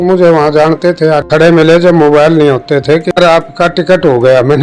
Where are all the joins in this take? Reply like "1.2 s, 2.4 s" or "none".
1.2 s, 3.1 s